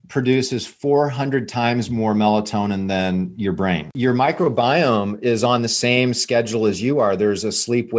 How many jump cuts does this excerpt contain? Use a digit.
1